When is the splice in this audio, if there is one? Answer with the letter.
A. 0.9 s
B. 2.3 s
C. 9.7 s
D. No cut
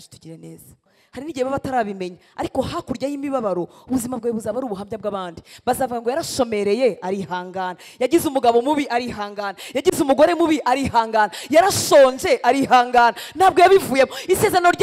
A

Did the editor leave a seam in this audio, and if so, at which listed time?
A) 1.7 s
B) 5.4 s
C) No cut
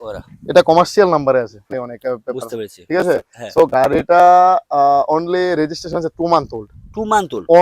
A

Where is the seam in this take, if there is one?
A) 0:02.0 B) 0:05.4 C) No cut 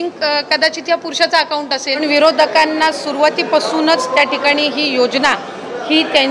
A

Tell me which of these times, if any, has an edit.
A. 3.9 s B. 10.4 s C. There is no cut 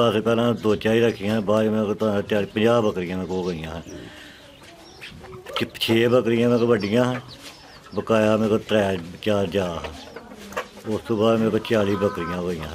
C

